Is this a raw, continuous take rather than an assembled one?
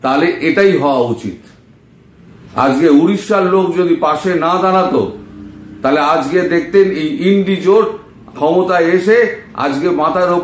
yes; 0 cuts

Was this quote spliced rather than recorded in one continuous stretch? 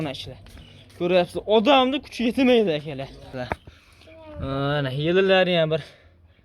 yes; 1 cut; at 3.3 s

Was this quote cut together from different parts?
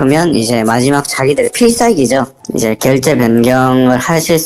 no; 0 cuts

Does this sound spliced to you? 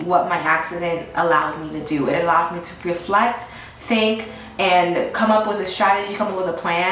no; 0 cuts

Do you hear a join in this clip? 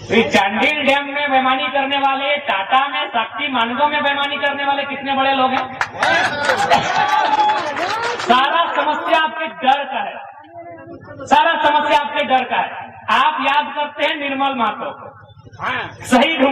no; 0 cuts

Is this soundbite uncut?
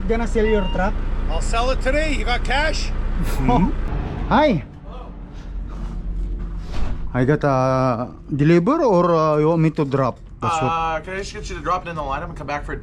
no; 1 cut; at 3.9 s

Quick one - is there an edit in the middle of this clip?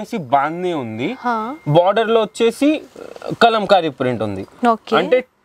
no; 0 cuts

